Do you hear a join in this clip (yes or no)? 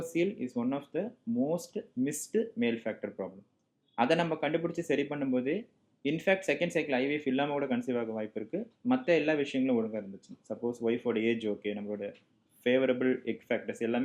no